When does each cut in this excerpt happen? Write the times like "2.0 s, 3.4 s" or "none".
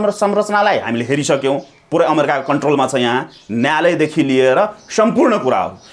none